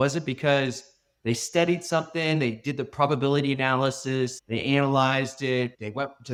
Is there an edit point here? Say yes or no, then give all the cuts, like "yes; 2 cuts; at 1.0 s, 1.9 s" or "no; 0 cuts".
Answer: no; 0 cuts